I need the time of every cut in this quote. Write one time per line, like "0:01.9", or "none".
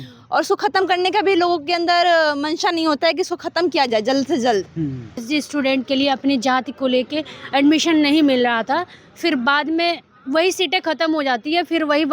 0:05.2